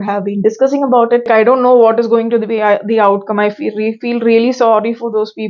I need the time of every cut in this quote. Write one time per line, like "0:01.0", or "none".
0:01.3